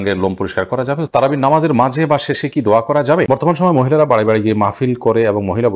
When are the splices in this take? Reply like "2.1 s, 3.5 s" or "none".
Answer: 1.1 s, 3.3 s